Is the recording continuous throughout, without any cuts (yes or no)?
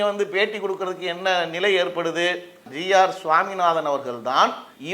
no